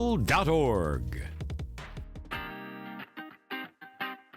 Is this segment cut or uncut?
cut